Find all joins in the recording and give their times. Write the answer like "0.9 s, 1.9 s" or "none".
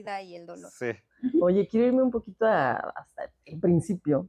none